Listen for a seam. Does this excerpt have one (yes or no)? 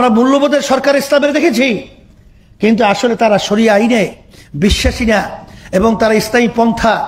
no